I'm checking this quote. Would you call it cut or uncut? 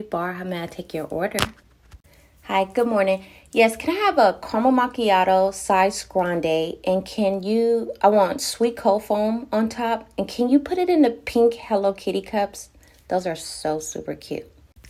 uncut